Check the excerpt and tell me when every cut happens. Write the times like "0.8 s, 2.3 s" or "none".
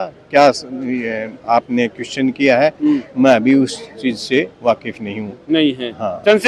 none